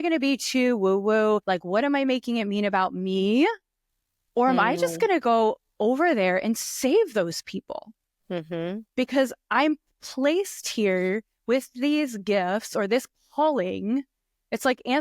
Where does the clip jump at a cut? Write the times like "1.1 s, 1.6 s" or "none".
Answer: 1.4 s